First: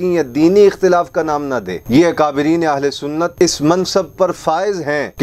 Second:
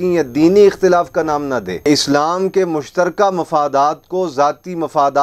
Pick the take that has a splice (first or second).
second